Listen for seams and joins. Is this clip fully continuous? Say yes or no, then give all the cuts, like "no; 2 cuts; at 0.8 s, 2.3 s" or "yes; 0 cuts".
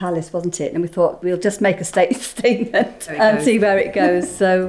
no; 2 cuts; at 1.2 s, 3.1 s